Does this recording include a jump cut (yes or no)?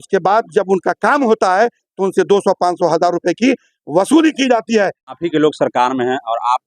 yes